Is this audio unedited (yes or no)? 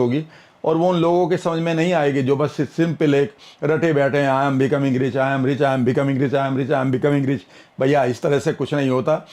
yes